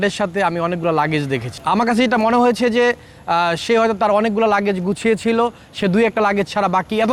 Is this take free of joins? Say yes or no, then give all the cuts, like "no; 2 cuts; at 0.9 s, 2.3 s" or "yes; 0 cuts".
no; 1 cut; at 1.5 s